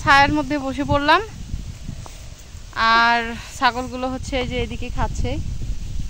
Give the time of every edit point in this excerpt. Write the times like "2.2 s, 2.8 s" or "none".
none